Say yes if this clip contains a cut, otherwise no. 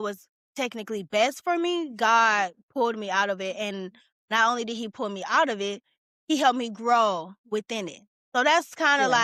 no